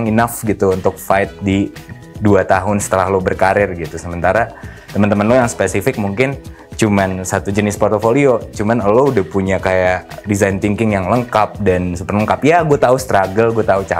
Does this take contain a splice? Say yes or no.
no